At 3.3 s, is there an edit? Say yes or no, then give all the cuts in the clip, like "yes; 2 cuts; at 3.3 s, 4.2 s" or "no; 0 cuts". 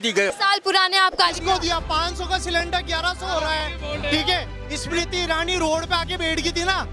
no; 1 cut; at 1.4 s